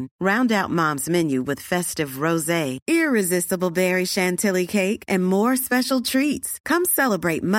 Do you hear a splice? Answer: no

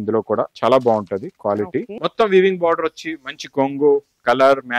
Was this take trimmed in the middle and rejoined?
yes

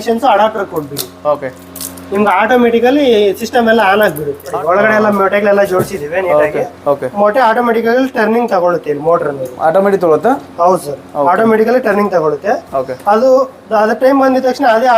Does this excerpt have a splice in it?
yes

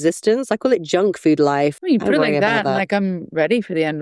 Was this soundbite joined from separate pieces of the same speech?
yes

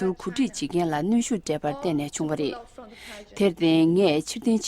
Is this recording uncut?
no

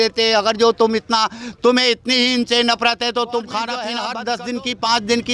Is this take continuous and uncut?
no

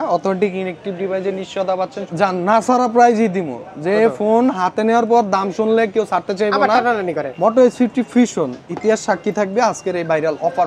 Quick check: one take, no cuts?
no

